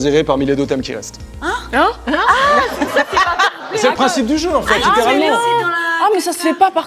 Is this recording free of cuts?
yes; 0 cuts

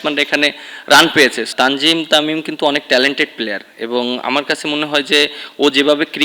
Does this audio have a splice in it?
yes; 1 cut; at 1.4 s

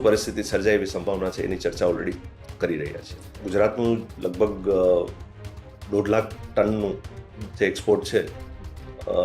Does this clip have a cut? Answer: yes; 1 cut; at 3.3 s

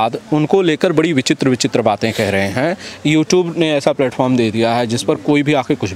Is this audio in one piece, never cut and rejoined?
yes; 0 cuts

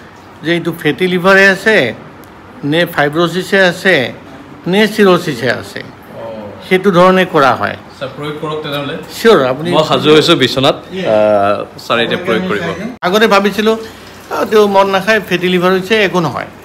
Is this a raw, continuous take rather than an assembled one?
no; 1 cut; at 13.0 s

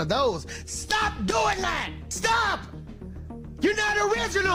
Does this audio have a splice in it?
no; 0 cuts

